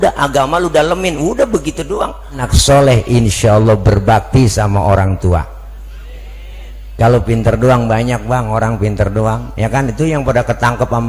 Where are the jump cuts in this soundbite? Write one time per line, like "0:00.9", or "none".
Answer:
0:02.4

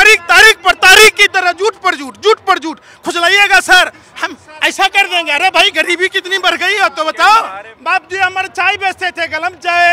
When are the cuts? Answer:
0:07.7

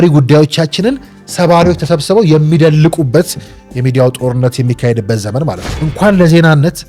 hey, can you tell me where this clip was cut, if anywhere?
0:05.7

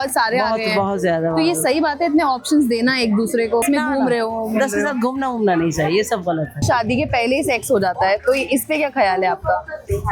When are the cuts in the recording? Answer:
0:03.6
0:06.6

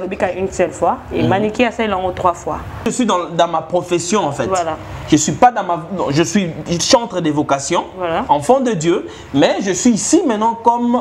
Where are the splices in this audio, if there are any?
0:02.9

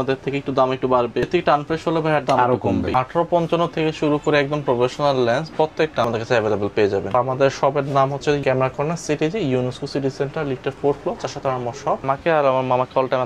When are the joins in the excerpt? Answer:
0:01.3
0:02.9
0:06.1
0:07.1
0:08.4
0:12.0

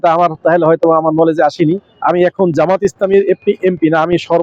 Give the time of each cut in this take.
0:01.9

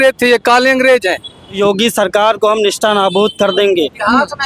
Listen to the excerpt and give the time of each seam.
0:01.6

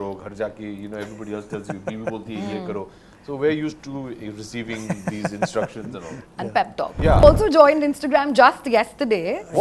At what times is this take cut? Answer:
0:07.2

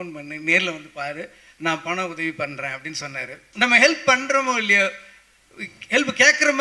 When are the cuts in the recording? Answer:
0:03.4

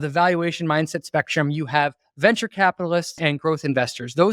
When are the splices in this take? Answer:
0:03.2

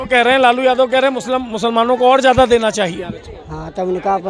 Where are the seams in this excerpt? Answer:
none

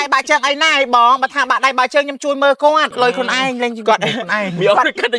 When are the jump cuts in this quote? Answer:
0:02.9

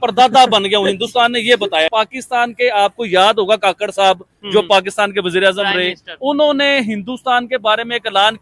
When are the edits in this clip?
0:01.9

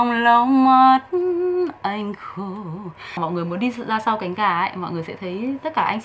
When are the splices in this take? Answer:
0:03.2

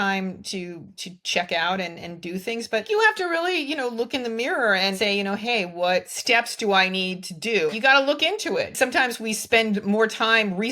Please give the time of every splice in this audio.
0:02.8
0:05.0
0:06.1
0:07.7
0:08.7

